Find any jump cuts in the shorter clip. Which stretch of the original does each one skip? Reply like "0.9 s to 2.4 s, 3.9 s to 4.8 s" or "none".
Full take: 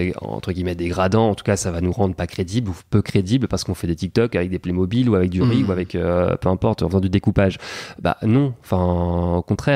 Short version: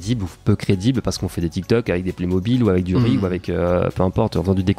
none